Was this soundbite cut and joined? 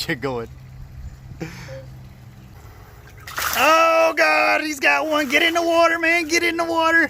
yes; 1 cut; at 2.6 s

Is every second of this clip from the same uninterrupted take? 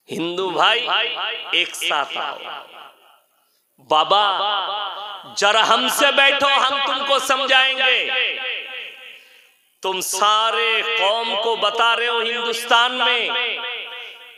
yes; 0 cuts

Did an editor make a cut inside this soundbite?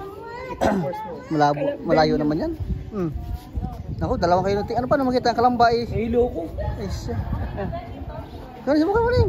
no; 0 cuts

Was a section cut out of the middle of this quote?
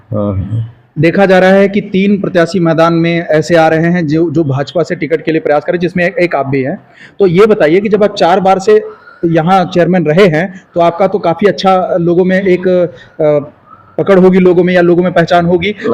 no; 0 cuts

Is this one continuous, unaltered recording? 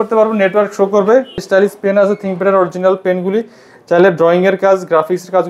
no; 1 cut; at 1.4 s

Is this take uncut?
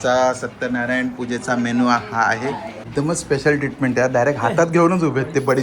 no; 1 cut; at 2.8 s

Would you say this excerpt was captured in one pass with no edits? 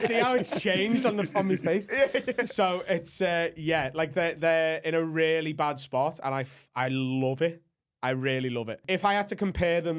no; 1 cut; at 8.8 s

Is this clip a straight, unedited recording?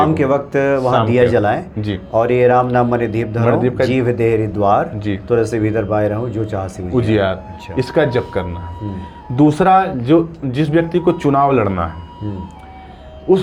yes; 0 cuts

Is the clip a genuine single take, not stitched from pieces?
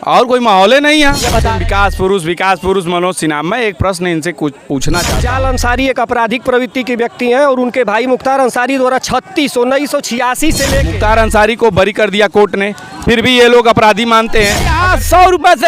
no; 4 cuts; at 1.5 s, 5.2 s, 10.9 s, 14.8 s

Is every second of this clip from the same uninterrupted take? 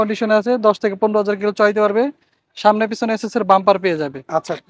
yes; 0 cuts

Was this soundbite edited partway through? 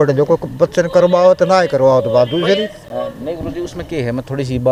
no; 0 cuts

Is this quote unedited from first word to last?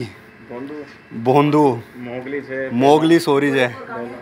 yes; 0 cuts

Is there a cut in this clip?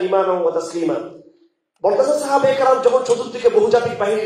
no; 0 cuts

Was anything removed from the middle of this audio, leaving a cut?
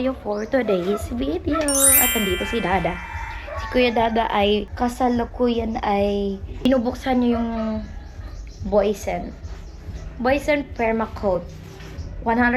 no; 0 cuts

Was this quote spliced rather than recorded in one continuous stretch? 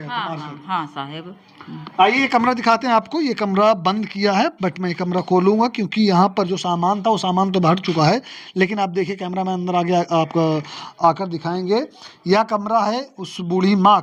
no; 0 cuts

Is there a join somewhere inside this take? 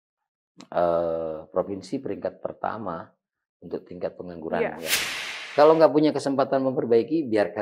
yes; 1 cut; at 5.4 s

